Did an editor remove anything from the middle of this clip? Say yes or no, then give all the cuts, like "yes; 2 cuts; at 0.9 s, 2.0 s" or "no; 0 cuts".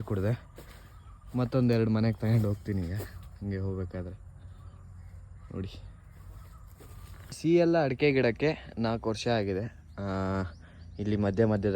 yes; 1 cut; at 7.3 s